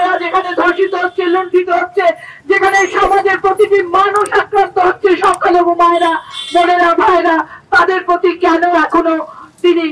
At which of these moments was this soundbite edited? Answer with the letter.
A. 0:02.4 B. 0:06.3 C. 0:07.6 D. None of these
D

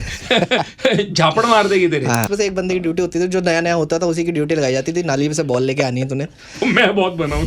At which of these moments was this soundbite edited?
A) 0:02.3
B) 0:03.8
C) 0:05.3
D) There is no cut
A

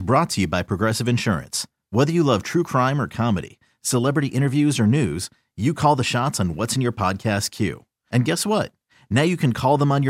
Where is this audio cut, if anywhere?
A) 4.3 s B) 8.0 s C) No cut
C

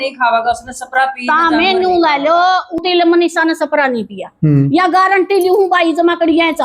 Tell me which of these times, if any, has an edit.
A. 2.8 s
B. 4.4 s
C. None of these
A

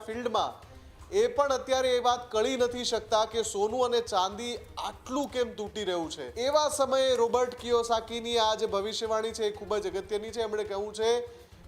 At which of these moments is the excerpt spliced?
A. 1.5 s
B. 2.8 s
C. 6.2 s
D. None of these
C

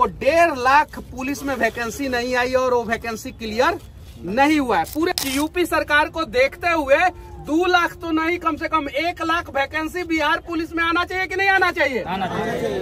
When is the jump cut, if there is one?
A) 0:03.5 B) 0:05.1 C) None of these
B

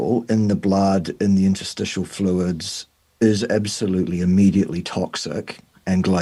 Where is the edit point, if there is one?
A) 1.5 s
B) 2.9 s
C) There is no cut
C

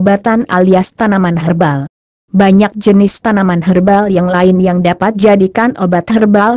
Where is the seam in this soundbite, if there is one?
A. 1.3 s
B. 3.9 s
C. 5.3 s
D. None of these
C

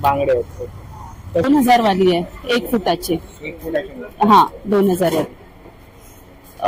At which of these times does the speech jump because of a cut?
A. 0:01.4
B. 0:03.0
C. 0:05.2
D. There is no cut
A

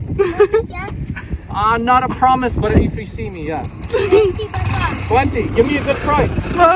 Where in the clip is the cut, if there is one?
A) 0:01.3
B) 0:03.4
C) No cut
C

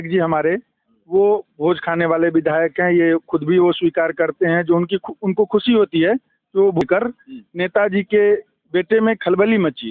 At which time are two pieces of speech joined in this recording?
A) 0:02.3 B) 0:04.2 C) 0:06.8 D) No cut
C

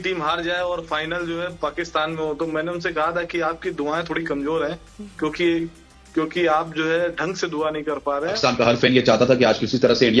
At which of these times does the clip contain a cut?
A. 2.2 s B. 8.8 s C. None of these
B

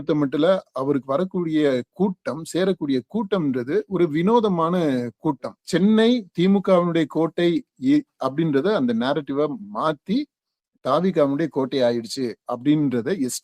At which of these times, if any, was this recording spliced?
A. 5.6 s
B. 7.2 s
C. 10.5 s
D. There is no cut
A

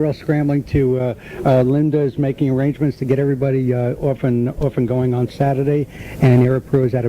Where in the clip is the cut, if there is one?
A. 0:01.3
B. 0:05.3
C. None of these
A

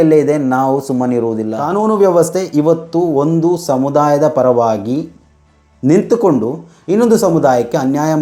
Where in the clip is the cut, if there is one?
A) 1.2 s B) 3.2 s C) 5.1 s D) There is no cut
A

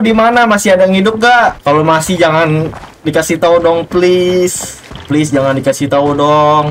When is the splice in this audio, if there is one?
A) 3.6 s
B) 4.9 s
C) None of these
C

